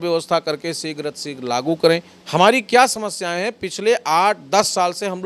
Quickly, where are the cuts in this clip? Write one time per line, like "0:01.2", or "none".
0:02.1